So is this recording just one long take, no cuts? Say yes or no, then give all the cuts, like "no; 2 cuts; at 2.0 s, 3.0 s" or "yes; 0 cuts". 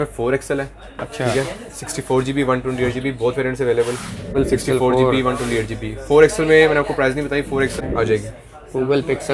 no; 2 cuts; at 4.4 s, 7.7 s